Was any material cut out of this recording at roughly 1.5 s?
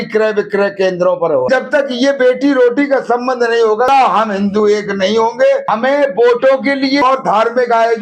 yes; 4 cuts; at 1.5 s, 3.9 s, 5.6 s, 7.0 s

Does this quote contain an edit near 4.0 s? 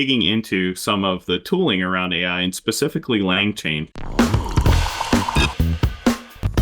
yes; 1 cut; at 4.0 s

